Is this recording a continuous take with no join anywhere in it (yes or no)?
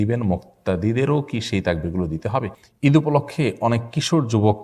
no